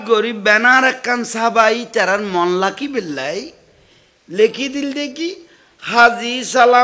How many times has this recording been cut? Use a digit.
0